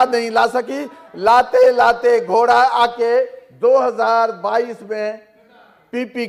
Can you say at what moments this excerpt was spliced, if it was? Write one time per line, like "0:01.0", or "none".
none